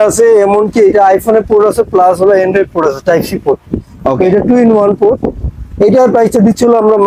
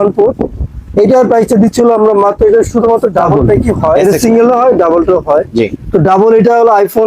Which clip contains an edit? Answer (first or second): second